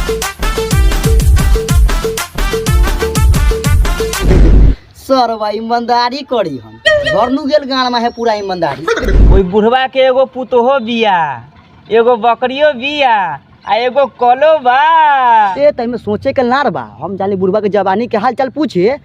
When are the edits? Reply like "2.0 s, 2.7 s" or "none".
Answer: 4.3 s, 9.1 s, 15.5 s